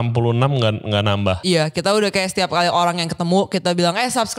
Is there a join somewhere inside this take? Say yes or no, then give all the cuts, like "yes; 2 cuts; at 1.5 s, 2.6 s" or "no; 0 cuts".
yes; 1 cut; at 1.4 s